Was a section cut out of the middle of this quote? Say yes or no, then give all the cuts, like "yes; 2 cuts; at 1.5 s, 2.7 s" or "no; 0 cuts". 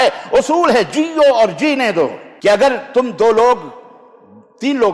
yes; 1 cut; at 2.2 s